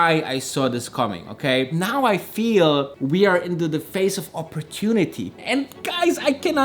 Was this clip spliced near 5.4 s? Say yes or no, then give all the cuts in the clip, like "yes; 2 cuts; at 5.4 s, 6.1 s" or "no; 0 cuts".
yes; 2 cuts; at 1.7 s, 5.4 s